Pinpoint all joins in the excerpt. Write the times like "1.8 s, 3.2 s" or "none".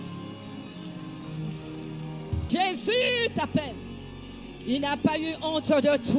2.4 s

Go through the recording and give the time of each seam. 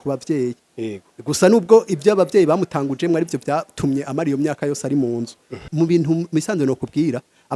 5.7 s

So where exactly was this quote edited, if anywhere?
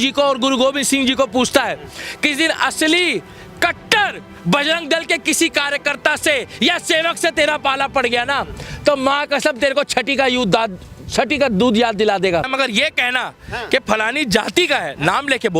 12.5 s

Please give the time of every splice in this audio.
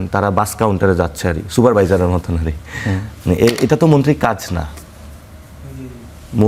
none

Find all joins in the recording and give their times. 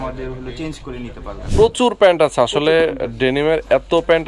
1.4 s

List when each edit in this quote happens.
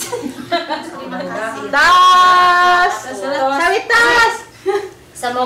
1.2 s

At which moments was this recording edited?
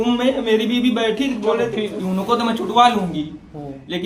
2.0 s

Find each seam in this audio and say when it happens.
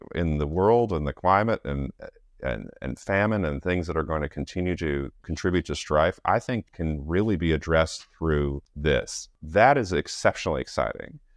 5.2 s, 6.7 s, 8.7 s, 9.4 s

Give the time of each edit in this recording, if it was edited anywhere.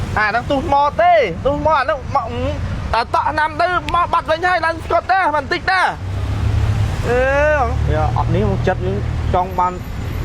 none

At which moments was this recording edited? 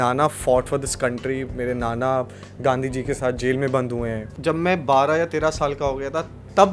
4.3 s

